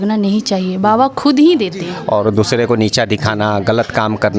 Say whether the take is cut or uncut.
cut